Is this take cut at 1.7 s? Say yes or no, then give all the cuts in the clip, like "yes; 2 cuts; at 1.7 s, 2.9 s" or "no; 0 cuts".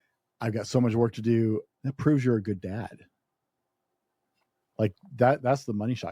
yes; 1 cut; at 1.7 s